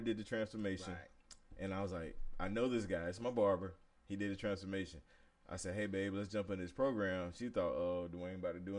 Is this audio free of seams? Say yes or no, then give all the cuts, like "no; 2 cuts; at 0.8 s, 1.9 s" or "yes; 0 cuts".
yes; 0 cuts